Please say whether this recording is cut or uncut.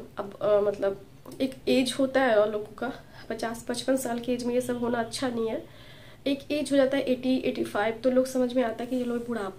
uncut